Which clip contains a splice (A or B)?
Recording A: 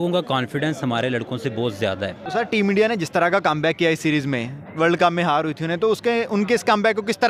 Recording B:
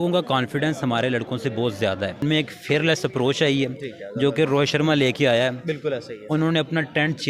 B